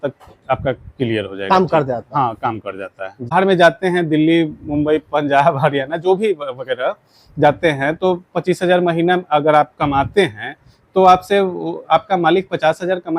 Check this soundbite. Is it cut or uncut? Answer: cut